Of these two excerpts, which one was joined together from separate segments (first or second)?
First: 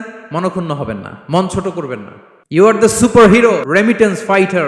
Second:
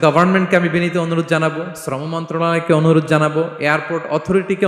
first